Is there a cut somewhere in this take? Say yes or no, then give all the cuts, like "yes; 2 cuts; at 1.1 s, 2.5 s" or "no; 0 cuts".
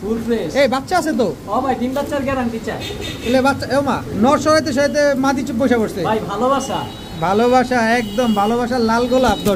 no; 0 cuts